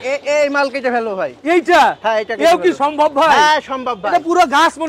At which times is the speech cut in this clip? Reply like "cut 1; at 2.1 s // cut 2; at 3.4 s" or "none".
none